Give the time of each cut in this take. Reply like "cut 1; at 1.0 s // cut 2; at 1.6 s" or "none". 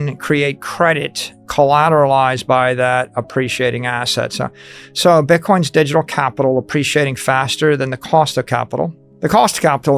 cut 1; at 9.0 s